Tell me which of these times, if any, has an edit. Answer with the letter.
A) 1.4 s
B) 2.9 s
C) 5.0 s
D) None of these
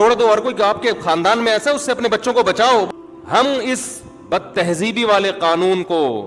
B